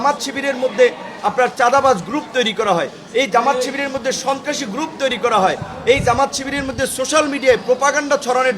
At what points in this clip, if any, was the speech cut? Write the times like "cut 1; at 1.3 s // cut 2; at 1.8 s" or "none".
none